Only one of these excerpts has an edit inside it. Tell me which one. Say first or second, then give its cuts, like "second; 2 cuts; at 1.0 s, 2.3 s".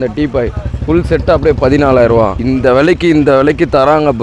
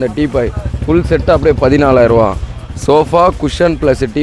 first; 1 cut; at 2.4 s